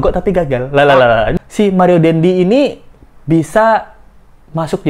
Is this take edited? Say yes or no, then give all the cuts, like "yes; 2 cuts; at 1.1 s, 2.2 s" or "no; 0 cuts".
yes; 1 cut; at 1.3 s